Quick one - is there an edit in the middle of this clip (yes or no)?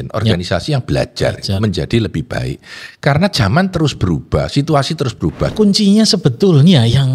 yes